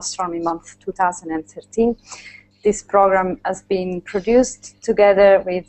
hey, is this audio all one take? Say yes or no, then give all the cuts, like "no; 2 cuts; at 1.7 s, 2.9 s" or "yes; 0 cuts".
yes; 0 cuts